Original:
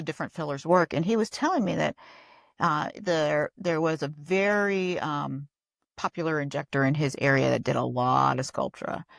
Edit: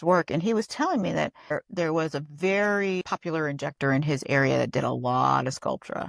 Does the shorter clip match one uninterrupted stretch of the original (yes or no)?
no